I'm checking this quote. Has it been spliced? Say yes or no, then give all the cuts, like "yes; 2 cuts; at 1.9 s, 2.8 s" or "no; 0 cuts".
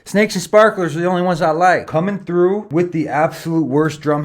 yes; 2 cuts; at 1.9 s, 2.7 s